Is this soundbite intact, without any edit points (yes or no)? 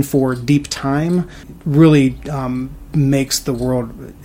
yes